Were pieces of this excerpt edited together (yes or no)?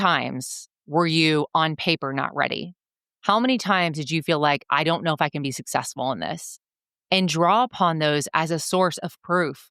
no